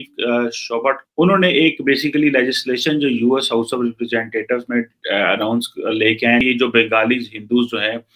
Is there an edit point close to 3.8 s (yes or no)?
no